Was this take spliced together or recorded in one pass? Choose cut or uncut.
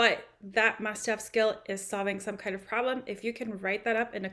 uncut